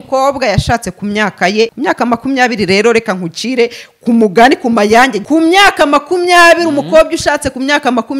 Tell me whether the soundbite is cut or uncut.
cut